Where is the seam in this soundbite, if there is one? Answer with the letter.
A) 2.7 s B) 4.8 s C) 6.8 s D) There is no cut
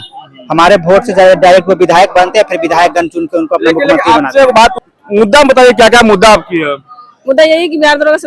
B